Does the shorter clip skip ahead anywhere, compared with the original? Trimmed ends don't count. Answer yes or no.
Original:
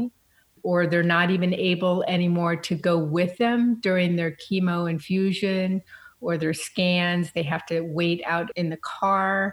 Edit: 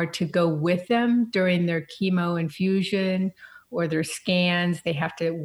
no